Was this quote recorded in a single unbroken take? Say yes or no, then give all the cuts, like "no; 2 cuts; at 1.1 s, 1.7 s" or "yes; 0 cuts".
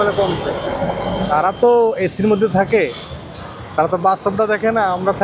yes; 0 cuts